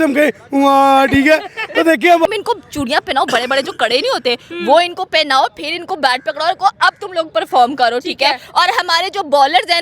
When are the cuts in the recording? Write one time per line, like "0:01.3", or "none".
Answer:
0:02.3